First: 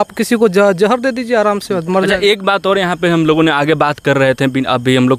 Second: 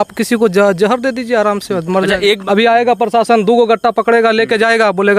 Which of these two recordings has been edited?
second; 1 cut; at 2.4 s

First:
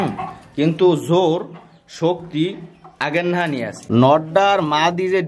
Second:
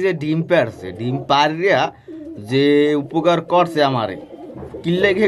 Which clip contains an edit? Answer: first; 1 cut; at 3.8 s

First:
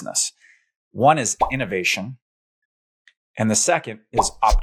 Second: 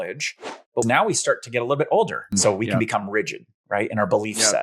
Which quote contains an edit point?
second; 2 cuts; at 0.8 s, 2.4 s

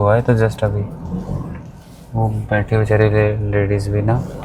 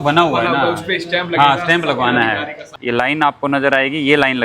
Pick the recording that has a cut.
second; 1 cut; at 2.7 s

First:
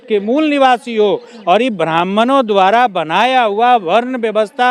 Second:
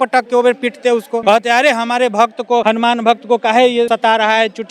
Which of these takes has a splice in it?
second; 3 cuts; at 1.1 s, 2.6 s, 3.9 s

